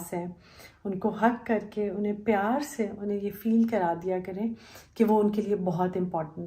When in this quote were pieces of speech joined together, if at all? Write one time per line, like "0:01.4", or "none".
none